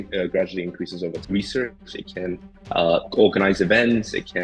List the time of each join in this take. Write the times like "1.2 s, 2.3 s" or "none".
1.2 s